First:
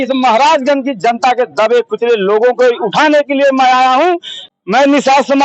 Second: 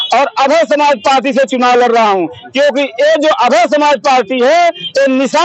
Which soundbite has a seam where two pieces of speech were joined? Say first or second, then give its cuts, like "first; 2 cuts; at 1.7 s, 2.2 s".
first; 1 cut; at 4.4 s